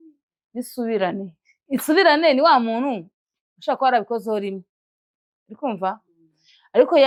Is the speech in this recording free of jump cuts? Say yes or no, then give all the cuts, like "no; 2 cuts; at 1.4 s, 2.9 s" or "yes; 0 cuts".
yes; 0 cuts